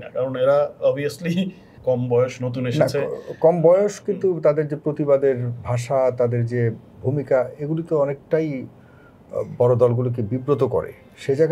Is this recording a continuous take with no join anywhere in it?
no; 1 cut; at 1.6 s

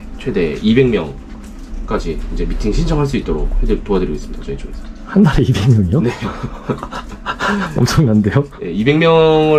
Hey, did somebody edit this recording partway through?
no; 0 cuts

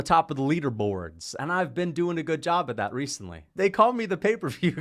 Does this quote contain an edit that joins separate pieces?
yes; 1 cut; at 3.5 s

